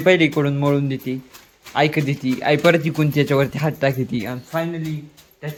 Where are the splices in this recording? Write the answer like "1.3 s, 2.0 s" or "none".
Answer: none